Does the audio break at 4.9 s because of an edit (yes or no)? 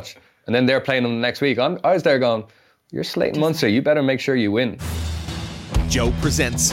yes